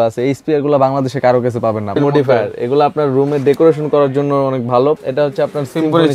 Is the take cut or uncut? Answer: cut